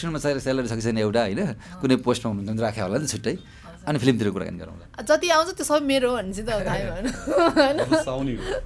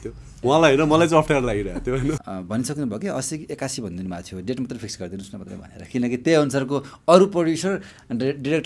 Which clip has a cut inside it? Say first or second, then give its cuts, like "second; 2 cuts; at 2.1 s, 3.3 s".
second; 1 cut; at 2.3 s